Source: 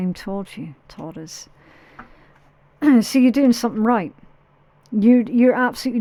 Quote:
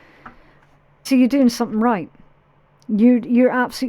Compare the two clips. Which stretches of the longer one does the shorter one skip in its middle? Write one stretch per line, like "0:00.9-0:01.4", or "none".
0:02.8-0:03.1